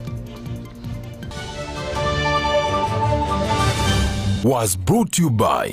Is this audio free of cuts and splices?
no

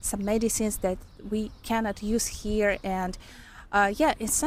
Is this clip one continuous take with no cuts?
yes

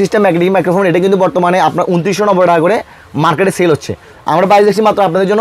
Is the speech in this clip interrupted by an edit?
no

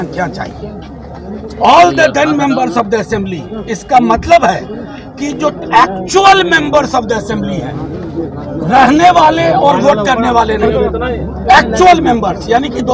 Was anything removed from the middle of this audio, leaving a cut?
no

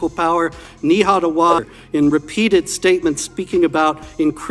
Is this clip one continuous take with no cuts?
no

